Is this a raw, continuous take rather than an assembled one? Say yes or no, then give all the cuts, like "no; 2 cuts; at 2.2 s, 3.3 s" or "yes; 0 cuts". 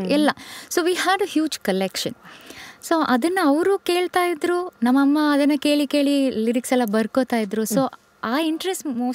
yes; 0 cuts